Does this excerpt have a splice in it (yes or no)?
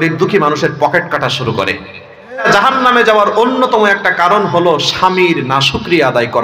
yes